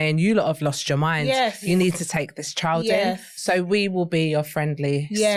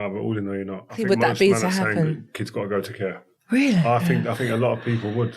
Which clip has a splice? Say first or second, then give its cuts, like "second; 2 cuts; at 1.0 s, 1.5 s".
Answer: second; 3 cuts; at 0.9 s, 3.3 s, 4.4 s